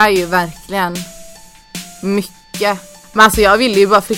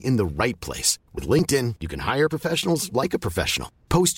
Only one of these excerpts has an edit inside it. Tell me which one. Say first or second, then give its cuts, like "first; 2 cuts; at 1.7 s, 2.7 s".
first; 1 cut; at 3.1 s